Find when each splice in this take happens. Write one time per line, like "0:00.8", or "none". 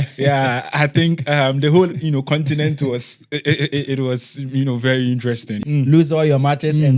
0:05.6